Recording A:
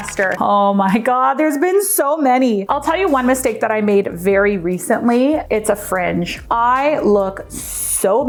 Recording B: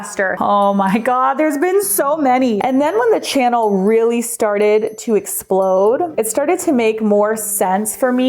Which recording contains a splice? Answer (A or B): B